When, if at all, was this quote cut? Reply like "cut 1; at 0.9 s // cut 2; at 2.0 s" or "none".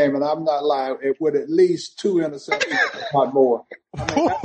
none